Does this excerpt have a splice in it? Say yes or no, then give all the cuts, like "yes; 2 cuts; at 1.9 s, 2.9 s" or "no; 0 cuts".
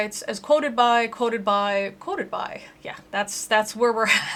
no; 0 cuts